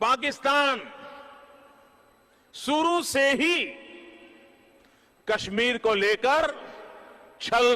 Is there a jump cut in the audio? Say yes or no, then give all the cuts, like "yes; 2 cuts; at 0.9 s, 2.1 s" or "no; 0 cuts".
no; 0 cuts